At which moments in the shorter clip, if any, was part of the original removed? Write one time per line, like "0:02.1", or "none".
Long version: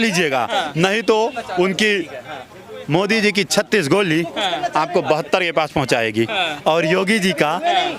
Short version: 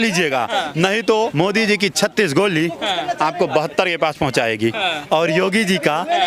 0:01.3